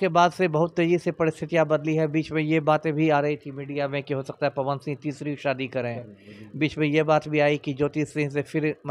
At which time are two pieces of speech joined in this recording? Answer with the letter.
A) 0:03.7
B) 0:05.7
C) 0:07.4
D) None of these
D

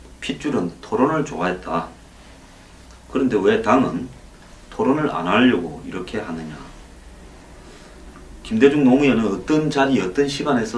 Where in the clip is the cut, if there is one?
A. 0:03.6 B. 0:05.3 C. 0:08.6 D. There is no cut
B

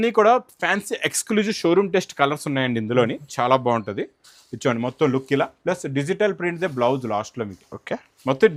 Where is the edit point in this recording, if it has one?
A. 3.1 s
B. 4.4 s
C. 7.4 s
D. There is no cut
D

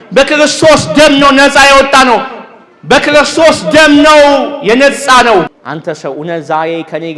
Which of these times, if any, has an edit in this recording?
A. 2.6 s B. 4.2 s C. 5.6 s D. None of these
C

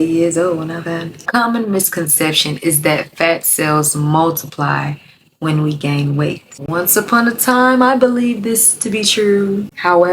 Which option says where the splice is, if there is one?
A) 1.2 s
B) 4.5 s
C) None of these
A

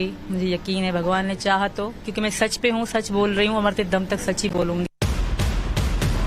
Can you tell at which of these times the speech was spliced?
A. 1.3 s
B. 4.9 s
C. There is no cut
B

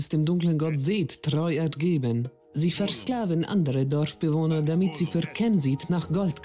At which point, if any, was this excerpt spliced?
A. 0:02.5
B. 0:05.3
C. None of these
C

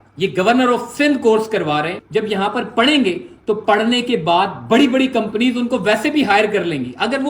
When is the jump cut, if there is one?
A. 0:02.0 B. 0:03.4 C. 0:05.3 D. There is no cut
A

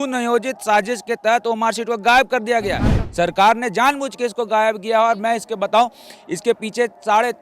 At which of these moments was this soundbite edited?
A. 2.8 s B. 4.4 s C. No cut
A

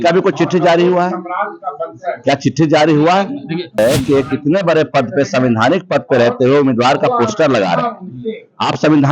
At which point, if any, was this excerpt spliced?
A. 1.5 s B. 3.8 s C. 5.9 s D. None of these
B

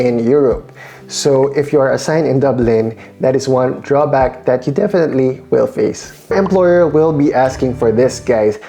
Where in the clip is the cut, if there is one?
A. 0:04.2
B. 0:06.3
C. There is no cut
B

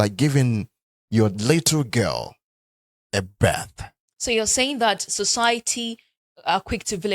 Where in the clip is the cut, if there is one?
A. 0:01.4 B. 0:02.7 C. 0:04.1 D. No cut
C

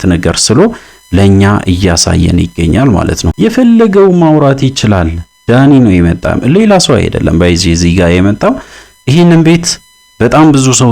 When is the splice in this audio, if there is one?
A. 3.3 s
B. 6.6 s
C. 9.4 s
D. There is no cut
A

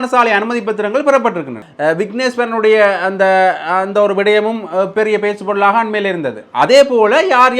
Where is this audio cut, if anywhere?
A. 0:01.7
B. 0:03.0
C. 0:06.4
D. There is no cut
A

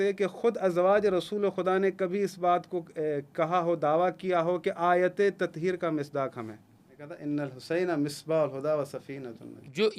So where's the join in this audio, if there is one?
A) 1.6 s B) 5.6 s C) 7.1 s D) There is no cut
C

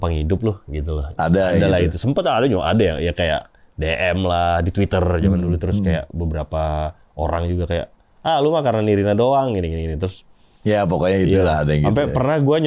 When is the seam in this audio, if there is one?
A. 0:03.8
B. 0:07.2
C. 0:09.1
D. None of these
D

